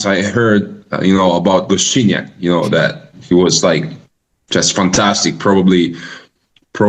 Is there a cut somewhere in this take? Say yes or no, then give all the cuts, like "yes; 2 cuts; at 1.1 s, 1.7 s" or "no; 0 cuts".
no; 0 cuts